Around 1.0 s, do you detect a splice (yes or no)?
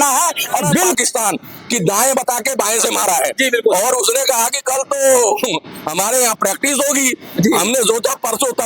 yes